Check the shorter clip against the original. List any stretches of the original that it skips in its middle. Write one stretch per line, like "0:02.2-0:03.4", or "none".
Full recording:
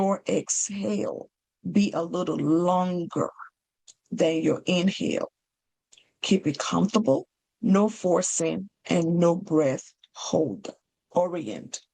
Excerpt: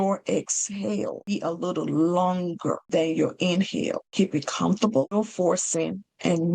0:01.3-0:01.8
0:03.3-0:04.1
0:05.3-0:06.2
0:07.3-0:07.8